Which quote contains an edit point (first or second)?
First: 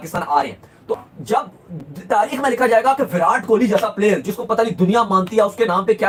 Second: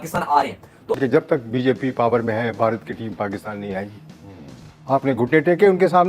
second